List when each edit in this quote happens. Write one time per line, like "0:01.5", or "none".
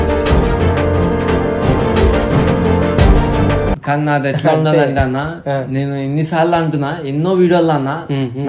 0:03.8